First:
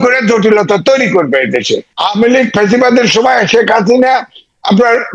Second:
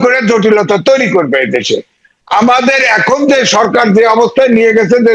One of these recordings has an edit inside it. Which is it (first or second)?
first